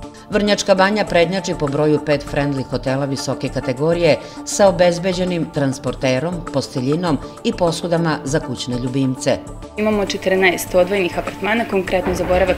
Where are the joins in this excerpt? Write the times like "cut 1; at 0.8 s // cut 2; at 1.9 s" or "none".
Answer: cut 1; at 9.7 s